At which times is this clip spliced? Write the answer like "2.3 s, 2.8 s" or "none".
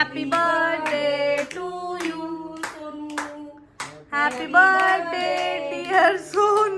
none